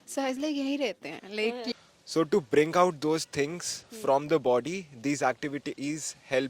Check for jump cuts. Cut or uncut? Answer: cut